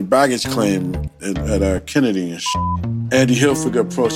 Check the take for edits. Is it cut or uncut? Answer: cut